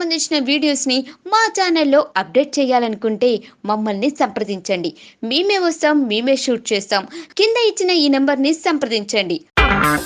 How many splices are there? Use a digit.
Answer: 0